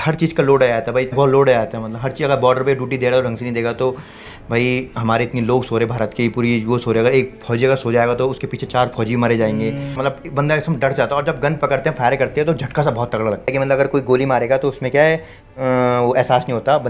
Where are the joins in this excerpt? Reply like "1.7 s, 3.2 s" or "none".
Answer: 1.1 s, 10.0 s, 13.4 s